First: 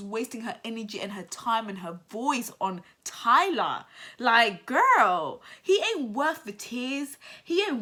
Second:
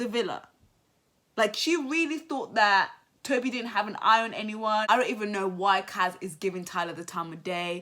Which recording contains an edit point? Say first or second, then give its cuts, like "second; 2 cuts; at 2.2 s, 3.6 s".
second; 1 cut; at 4.8 s